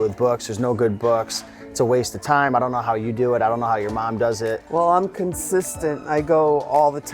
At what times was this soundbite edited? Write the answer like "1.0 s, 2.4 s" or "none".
4.6 s